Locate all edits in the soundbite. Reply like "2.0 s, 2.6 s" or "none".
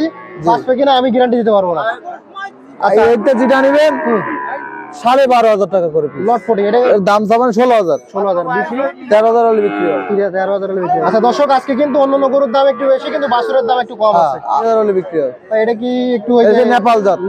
1.9 s, 6.9 s, 11.1 s, 14.6 s